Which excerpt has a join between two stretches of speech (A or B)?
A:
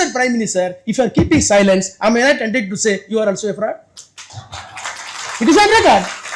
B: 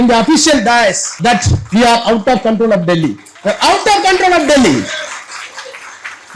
B